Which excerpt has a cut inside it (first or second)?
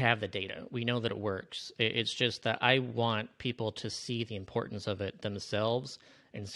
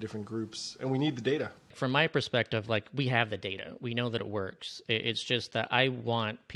second